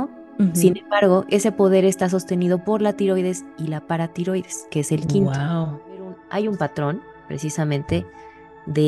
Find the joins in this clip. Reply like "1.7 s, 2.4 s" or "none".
6.2 s

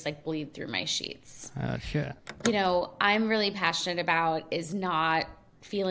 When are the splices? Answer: 2.2 s

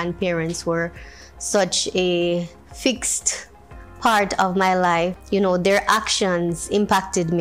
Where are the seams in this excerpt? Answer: 5.2 s

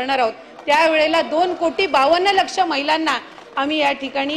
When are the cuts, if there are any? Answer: none

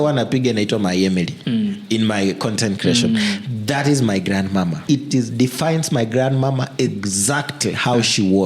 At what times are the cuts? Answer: 1.4 s, 4.8 s

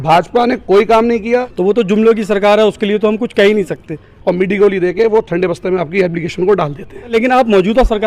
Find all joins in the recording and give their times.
1.4 s, 4.1 s, 7.1 s

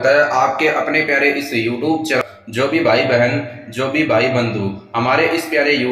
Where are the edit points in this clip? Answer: 2.2 s

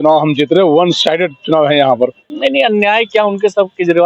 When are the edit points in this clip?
2.2 s

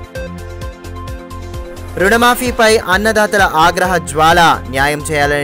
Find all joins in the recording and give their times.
none

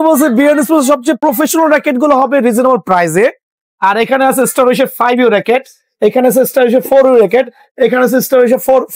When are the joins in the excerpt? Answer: 1.2 s

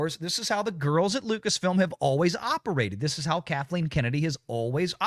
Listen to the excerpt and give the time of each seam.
none

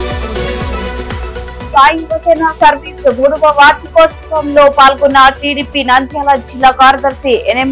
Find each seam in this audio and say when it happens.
none

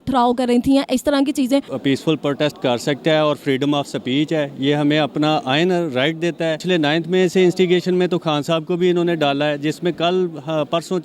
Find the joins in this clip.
1.7 s, 6.6 s

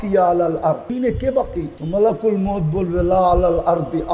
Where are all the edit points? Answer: 0.9 s, 1.8 s

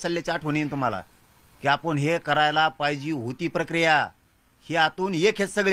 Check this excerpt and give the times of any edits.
none

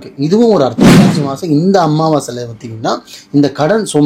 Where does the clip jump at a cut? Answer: 1.2 s

